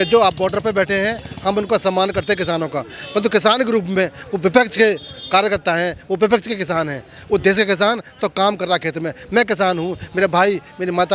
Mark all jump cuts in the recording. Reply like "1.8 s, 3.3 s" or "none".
none